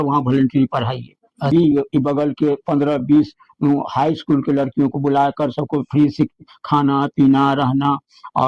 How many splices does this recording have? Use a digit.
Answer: 1